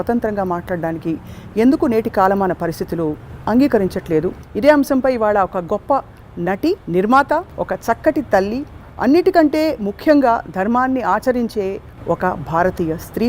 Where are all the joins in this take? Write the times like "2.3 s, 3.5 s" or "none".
4.4 s, 6.8 s, 7.5 s